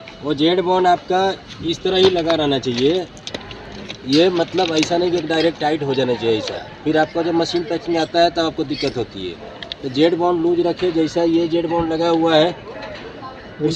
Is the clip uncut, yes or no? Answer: yes